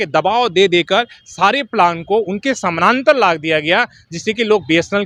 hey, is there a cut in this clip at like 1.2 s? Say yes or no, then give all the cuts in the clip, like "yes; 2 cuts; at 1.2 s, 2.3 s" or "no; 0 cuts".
no; 0 cuts